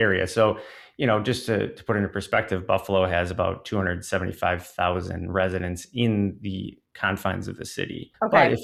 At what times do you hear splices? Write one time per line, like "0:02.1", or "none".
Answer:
none